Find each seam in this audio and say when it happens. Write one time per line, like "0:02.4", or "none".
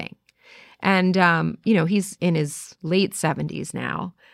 0:02.4